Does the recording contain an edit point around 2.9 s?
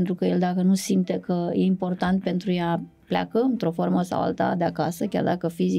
no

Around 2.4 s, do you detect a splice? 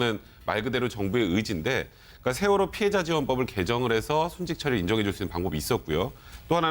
no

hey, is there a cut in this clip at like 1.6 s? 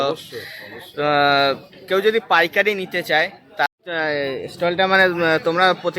no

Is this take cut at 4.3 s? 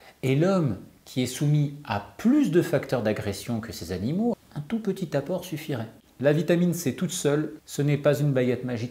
yes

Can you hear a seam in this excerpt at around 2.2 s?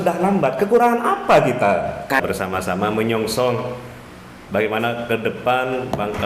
yes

